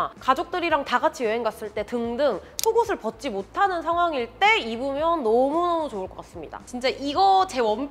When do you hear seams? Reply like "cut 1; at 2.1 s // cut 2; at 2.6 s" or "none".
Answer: cut 1; at 6.6 s

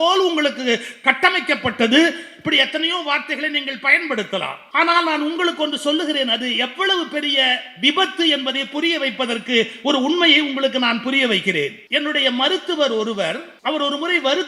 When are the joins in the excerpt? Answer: cut 1; at 4.6 s // cut 2; at 11.8 s // cut 3; at 13.5 s

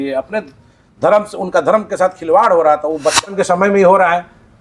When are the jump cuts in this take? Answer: cut 1; at 3.2 s

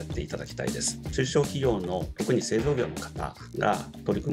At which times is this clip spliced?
cut 1; at 1.0 s

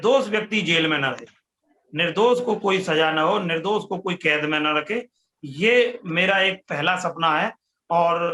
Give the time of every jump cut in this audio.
none

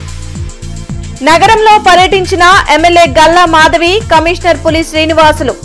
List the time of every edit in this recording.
cut 1; at 1.0 s

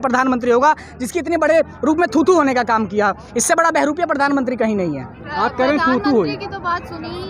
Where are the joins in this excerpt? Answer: none

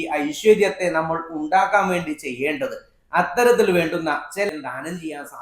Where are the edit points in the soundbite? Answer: cut 1; at 4.5 s

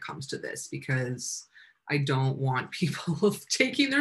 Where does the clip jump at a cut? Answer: none

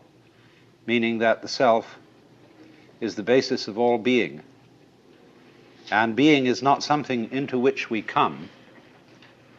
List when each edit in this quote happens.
none

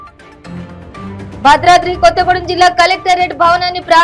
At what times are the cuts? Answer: cut 1; at 1.4 s

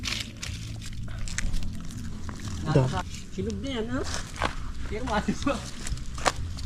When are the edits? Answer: cut 1; at 3.1 s

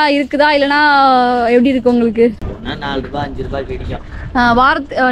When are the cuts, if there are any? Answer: cut 1; at 2.5 s

